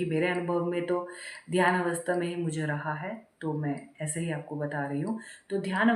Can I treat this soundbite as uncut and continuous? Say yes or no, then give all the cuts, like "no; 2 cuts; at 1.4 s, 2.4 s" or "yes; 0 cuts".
yes; 0 cuts